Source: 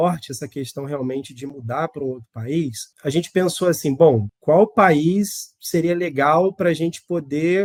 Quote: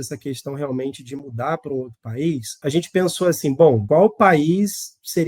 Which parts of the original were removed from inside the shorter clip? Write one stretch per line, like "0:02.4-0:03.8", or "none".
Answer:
0:02.8-0:02.9
0:04.2-0:04.4